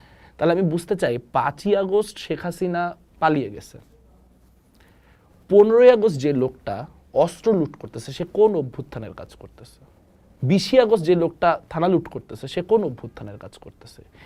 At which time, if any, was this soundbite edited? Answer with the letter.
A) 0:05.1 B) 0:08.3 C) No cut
C